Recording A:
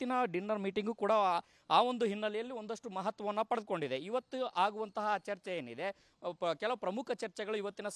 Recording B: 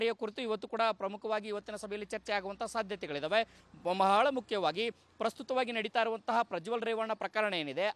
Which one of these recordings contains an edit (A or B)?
B